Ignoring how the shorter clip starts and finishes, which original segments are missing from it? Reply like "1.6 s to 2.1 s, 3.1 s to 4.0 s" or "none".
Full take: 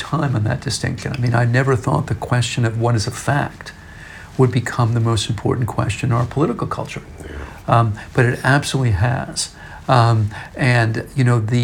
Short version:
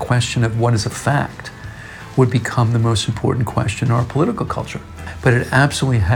7.3 s to 8.0 s